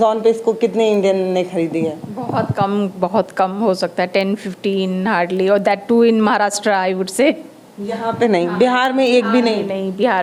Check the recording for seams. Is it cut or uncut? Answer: uncut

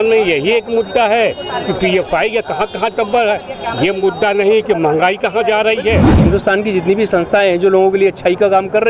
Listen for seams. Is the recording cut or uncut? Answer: cut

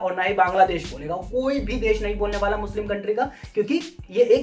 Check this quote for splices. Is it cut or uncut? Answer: uncut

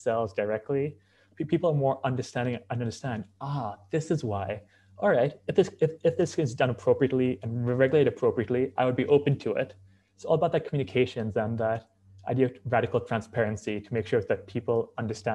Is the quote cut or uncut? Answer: uncut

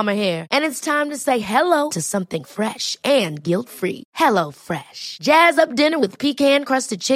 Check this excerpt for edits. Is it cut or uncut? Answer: uncut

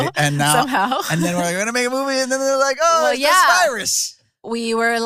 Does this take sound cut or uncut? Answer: uncut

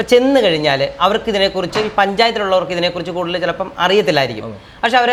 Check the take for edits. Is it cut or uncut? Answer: uncut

